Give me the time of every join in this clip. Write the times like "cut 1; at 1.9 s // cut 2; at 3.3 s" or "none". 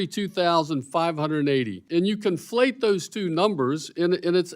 cut 1; at 1.8 s